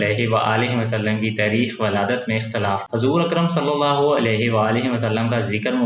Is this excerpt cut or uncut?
cut